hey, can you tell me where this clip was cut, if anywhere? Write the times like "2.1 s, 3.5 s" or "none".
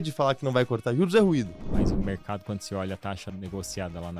1.7 s, 3.2 s